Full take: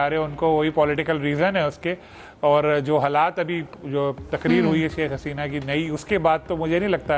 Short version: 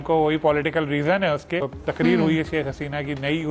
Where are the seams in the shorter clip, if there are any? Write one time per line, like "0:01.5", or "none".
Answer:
0:01.8